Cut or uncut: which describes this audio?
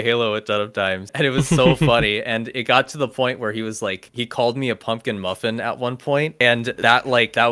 uncut